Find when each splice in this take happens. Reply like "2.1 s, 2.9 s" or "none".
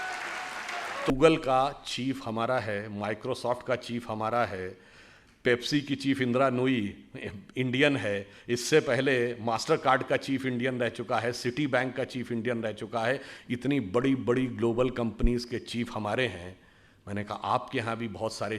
1.1 s